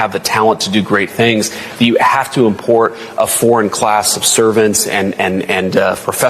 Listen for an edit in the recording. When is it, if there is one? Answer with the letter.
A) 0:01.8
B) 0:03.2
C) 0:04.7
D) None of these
D